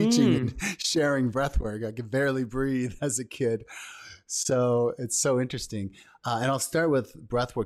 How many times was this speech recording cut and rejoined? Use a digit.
0